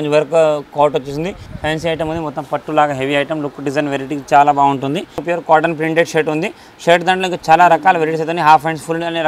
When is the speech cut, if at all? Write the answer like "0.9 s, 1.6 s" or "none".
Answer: 1.4 s, 5.2 s

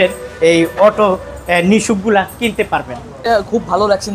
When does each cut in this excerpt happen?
3.2 s

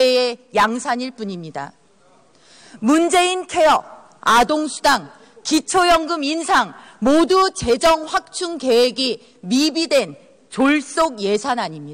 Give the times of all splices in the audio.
1.9 s

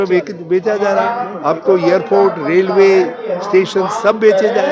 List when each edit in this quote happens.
none

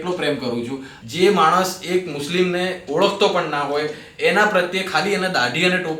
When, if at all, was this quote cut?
0.9 s

